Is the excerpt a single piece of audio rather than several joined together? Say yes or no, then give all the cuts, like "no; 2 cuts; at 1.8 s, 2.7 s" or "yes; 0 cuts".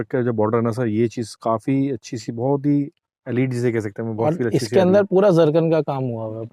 yes; 0 cuts